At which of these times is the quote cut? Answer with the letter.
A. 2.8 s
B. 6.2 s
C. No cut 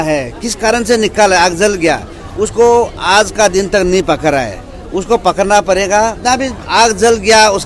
B